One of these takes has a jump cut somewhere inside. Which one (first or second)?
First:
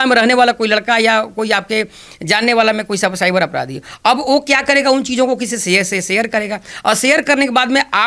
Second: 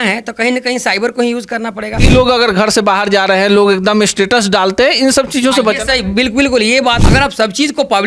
second